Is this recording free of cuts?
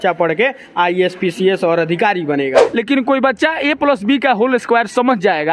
no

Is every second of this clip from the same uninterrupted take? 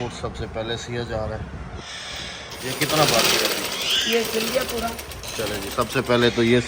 yes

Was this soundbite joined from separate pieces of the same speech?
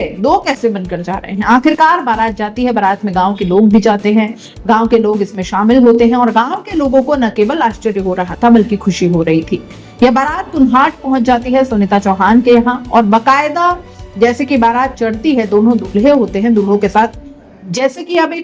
no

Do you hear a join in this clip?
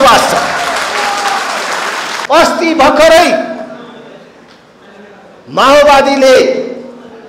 no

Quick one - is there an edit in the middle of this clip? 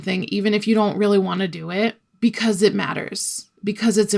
no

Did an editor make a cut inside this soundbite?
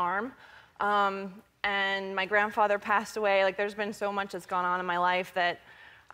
no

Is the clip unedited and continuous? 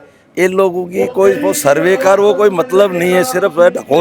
yes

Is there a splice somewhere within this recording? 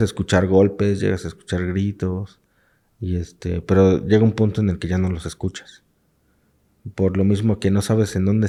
no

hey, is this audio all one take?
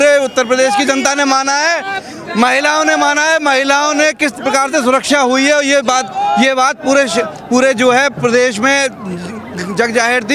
yes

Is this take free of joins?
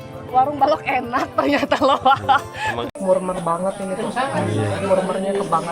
no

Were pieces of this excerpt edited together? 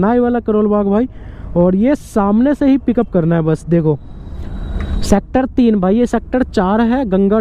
no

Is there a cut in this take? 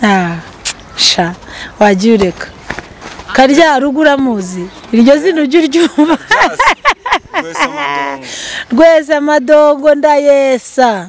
no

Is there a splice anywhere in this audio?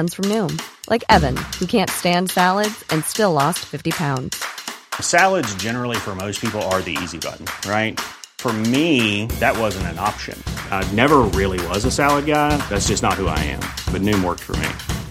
no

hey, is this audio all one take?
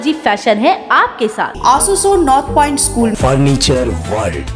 no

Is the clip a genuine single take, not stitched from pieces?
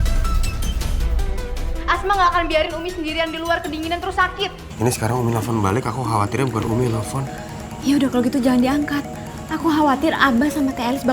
no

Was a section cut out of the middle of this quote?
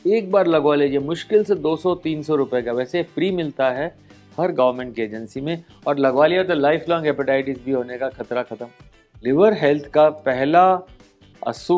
yes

